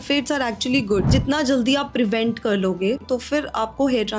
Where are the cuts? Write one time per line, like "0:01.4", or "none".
0:01.1
0:03.0

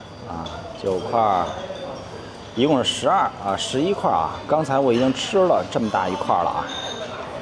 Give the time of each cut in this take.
none

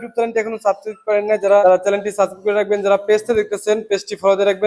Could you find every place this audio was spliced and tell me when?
0:01.6

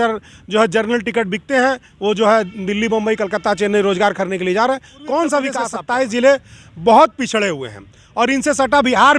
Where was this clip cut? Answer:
0:05.7

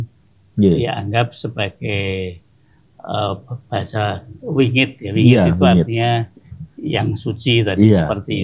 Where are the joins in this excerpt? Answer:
none

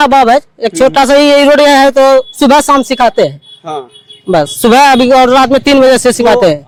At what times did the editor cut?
none

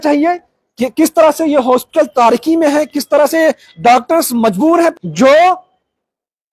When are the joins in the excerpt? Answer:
0:05.0

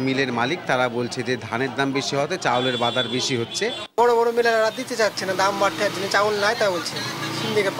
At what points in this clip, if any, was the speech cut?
none

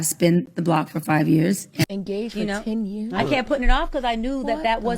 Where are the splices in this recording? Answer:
0:01.8

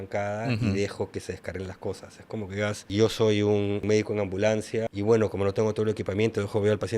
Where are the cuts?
0:02.8
0:03.8
0:04.9

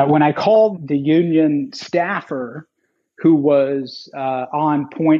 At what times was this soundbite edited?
none

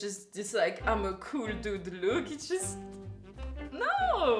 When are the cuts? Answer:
none

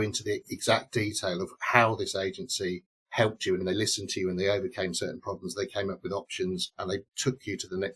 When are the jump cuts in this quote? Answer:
0:03.6

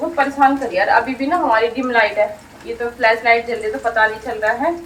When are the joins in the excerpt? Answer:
none

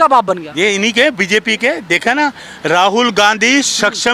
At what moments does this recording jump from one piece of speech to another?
none

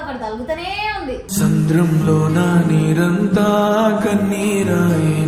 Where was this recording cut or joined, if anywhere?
none

